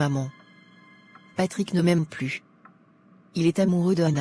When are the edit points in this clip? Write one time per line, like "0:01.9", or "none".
none